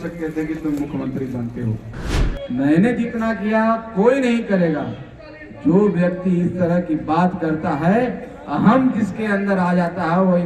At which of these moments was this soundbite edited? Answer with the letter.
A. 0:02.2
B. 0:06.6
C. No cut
A